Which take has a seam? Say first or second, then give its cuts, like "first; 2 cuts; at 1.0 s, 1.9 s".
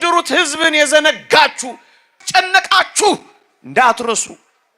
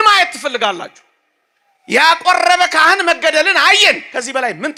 first; 1 cut; at 2.2 s